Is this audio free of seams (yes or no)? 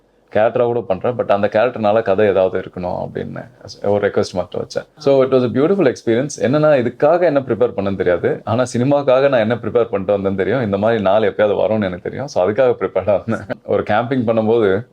no